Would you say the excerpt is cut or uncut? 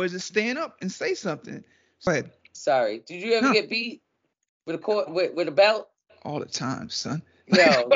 cut